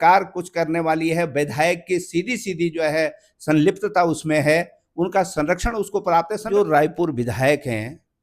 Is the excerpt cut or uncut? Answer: cut